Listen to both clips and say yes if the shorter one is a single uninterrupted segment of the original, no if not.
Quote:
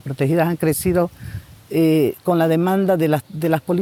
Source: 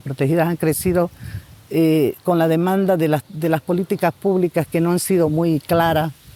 yes